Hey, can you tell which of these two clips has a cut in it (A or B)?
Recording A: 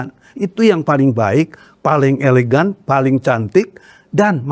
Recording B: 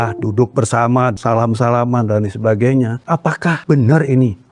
B